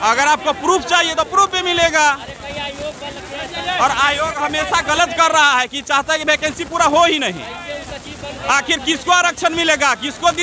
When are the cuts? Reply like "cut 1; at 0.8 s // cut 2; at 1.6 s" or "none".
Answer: none